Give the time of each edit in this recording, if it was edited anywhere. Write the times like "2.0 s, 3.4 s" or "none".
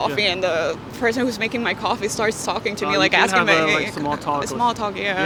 none